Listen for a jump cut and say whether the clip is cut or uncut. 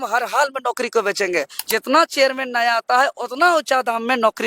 cut